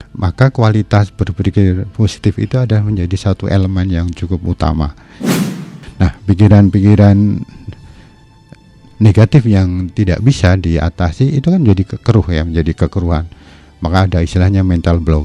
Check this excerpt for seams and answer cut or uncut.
cut